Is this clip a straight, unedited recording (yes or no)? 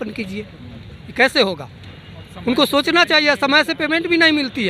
yes